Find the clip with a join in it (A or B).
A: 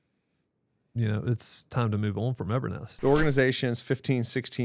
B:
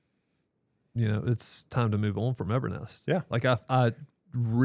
A